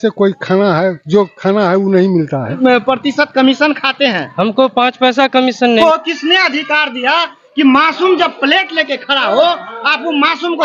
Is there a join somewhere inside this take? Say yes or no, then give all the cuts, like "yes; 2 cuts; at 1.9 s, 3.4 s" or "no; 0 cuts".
yes; 2 cuts; at 2.6 s, 5.8 s